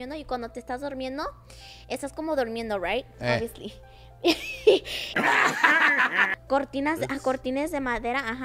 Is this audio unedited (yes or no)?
no